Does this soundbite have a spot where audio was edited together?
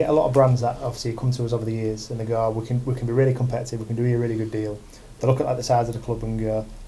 no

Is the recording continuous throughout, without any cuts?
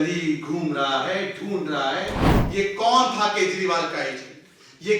no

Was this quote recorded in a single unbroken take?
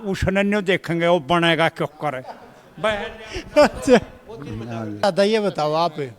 no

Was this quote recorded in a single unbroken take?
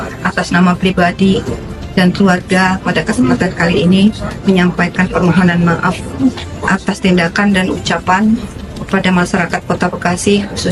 no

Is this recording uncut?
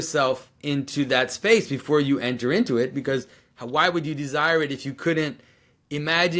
yes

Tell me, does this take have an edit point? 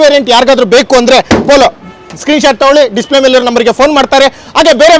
no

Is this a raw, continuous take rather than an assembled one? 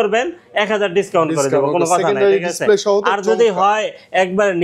yes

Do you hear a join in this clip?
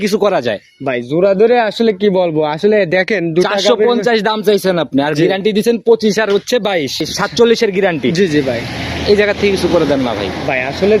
yes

